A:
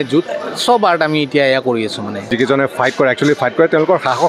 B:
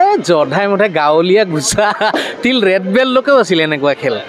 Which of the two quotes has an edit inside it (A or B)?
A